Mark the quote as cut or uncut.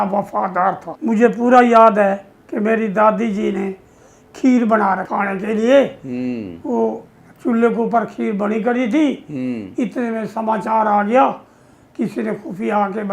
cut